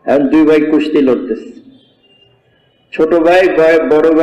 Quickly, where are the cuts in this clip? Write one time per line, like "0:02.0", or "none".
none